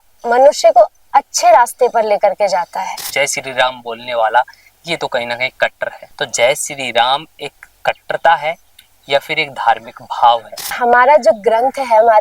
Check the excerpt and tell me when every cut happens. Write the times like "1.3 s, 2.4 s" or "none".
3.0 s, 6.0 s, 10.7 s

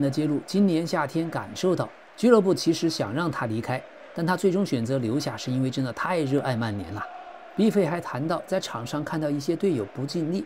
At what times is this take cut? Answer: none

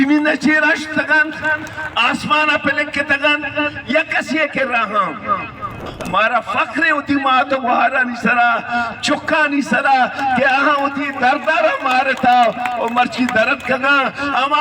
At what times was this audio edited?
5.9 s

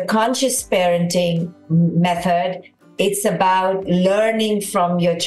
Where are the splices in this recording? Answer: 1.6 s

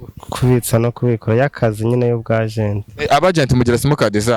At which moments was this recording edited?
none

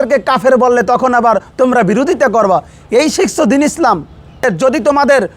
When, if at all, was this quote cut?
4.4 s

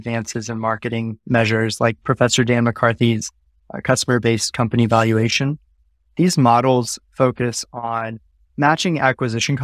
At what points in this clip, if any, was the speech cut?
none

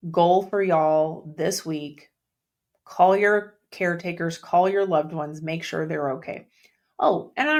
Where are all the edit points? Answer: none

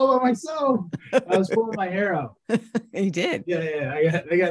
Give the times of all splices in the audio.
2.4 s, 3.4 s

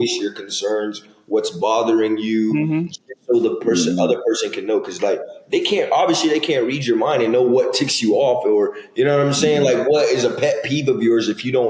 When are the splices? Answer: none

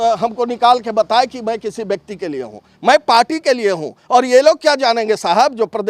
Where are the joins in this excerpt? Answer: none

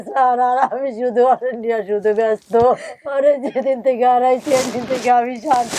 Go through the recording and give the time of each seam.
3.0 s

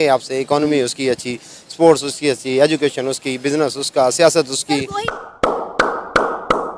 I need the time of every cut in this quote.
4.9 s

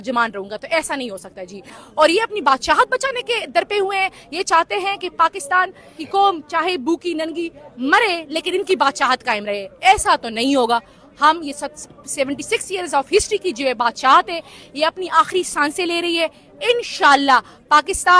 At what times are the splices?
1.8 s

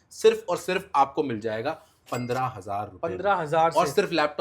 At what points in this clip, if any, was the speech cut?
none

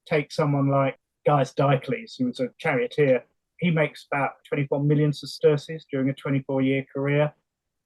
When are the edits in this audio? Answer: 1.0 s, 2.5 s, 3.4 s, 4.4 s

